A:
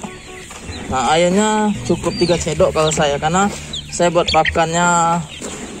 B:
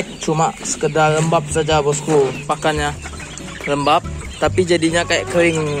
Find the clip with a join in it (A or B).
B